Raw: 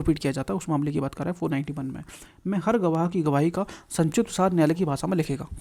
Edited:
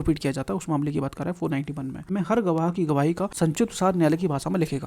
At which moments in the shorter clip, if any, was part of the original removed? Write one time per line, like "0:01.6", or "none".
0:02.0
0:03.3